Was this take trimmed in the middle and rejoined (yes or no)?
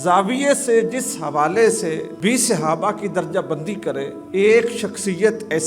yes